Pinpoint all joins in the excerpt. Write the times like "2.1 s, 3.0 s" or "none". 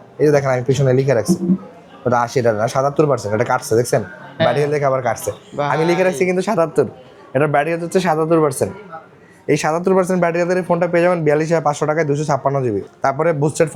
none